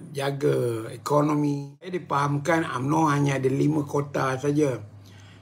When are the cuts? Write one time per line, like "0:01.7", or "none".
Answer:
0:02.1